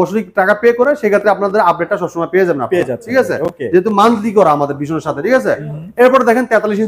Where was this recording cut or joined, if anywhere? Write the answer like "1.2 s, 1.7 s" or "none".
none